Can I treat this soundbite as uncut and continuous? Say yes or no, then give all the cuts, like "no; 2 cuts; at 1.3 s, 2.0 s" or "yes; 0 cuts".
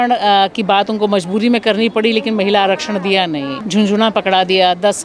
no; 1 cut; at 3.6 s